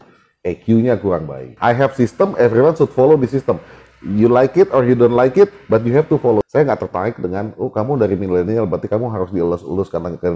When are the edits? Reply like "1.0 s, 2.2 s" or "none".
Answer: 1.5 s, 6.4 s